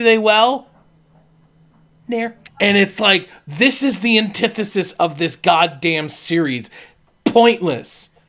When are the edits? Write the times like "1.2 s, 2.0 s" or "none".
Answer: 2.4 s